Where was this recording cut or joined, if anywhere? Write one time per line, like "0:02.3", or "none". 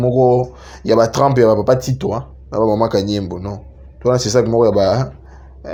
none